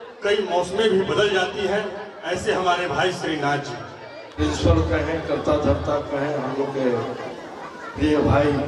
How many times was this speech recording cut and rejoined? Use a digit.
1